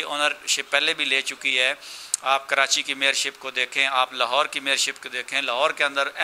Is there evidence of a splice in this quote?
no; 0 cuts

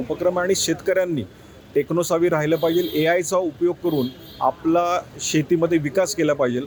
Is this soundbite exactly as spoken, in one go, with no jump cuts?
yes; 0 cuts

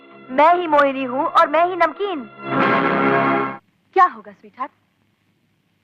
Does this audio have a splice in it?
yes; 1 cut; at 3.5 s

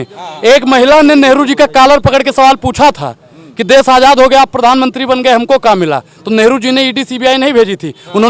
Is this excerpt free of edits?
yes; 0 cuts

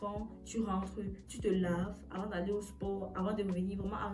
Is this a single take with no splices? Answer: yes; 0 cuts

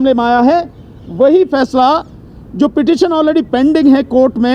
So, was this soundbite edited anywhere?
no; 0 cuts

